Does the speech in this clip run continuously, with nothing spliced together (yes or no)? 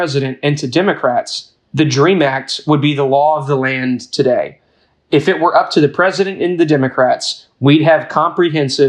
yes